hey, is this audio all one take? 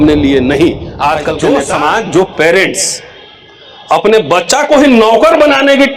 no; 1 cut; at 1.4 s

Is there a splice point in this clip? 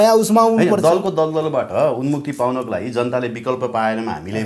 no; 0 cuts

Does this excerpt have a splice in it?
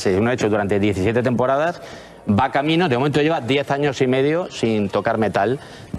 no; 0 cuts

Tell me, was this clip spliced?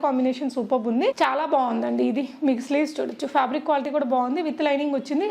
yes; 1 cut; at 1.2 s

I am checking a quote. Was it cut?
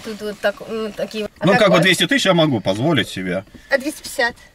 yes; 1 cut; at 1.2 s

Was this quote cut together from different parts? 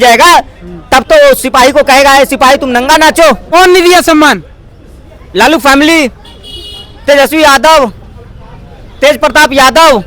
yes; 1 cut; at 3.4 s

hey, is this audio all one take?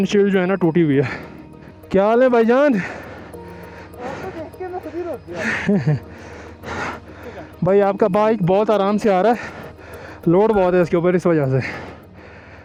yes; 0 cuts

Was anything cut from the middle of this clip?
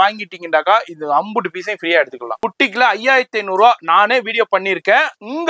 yes; 1 cut; at 2.5 s

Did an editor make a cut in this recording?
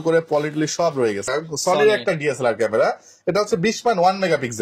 yes; 1 cut; at 1.2 s

